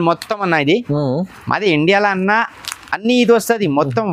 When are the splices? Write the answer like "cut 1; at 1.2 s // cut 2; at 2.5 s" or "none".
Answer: none